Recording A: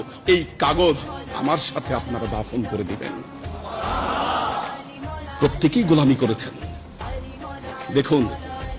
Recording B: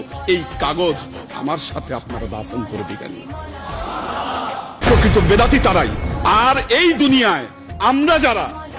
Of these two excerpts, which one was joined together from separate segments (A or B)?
B